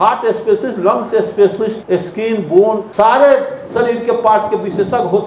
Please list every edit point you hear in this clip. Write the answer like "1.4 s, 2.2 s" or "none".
1.8 s, 2.9 s